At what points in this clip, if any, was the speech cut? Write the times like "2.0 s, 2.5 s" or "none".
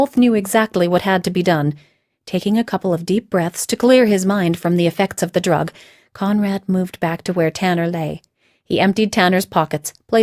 9.1 s